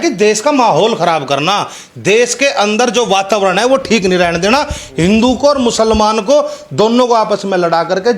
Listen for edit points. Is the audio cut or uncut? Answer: uncut